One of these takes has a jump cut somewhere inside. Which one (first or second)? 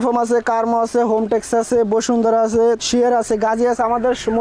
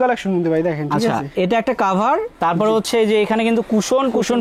first